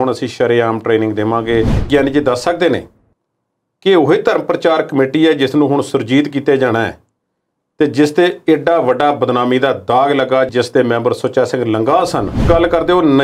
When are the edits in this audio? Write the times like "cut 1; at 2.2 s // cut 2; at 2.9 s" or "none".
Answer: cut 1; at 1.9 s // cut 2; at 12.5 s

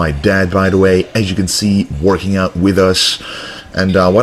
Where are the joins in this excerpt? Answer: none

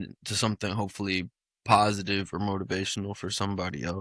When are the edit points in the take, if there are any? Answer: none

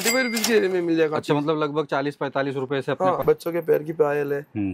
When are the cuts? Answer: cut 1; at 3.2 s

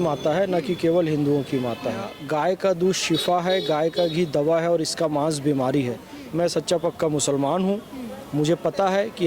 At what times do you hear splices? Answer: cut 1; at 2.1 s // cut 2; at 6.2 s

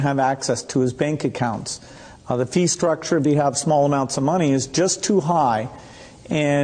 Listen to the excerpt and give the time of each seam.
cut 1; at 4.7 s

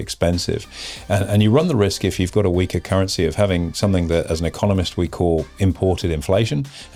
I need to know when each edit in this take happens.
none

